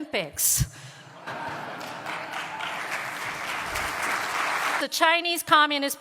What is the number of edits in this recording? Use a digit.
1